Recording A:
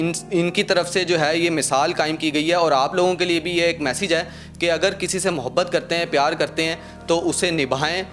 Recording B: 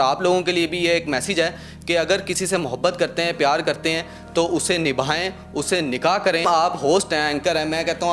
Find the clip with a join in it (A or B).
B